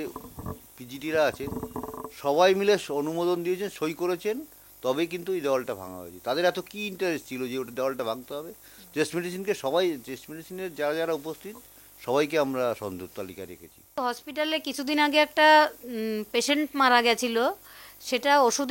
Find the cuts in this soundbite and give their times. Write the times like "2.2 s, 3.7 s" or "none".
14.0 s

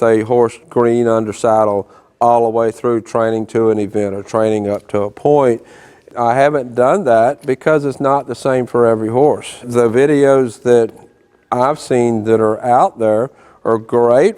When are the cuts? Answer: 6.0 s, 9.7 s

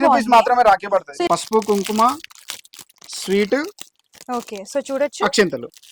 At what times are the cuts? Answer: 1.1 s

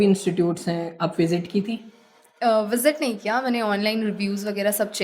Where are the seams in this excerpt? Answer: none

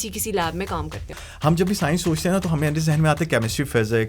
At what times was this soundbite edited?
1.2 s

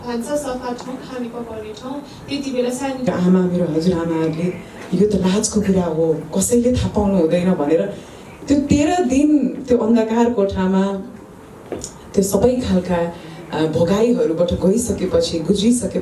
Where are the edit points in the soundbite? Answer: 3.1 s

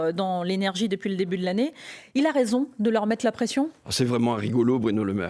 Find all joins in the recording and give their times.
none

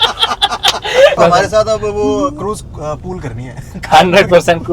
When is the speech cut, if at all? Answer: 1.2 s

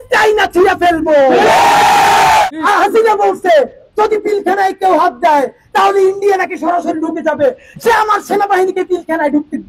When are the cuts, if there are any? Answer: 2.5 s

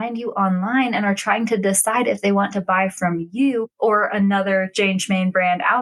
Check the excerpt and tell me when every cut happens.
none

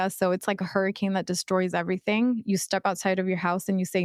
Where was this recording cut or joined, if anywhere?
none

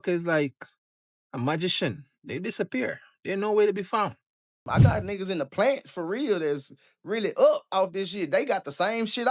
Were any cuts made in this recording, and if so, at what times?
4.6 s

